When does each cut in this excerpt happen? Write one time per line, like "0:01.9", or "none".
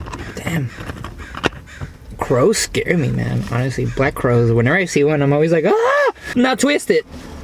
0:06.2